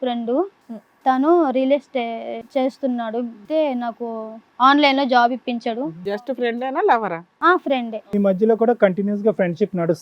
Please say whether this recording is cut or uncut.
cut